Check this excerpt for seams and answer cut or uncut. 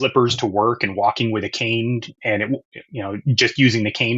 uncut